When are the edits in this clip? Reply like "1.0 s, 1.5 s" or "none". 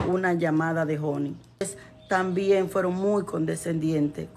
1.8 s